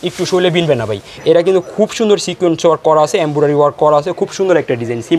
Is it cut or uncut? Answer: cut